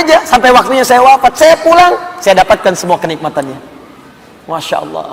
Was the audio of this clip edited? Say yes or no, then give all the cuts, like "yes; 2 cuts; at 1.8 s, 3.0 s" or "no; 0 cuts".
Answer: no; 0 cuts